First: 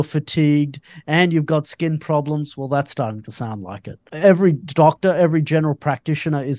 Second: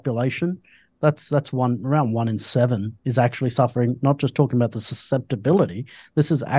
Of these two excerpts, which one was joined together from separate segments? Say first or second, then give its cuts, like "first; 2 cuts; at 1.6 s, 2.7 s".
first; 1 cut; at 4.1 s